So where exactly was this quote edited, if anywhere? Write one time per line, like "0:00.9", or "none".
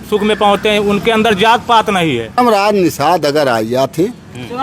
0:02.4